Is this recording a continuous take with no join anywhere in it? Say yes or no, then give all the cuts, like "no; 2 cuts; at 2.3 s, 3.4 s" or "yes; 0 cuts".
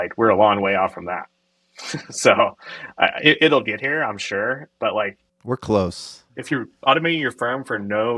yes; 0 cuts